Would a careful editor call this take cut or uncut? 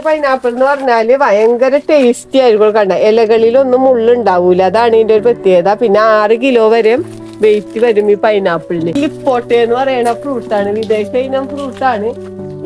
cut